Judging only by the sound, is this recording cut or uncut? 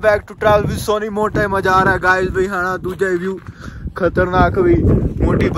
uncut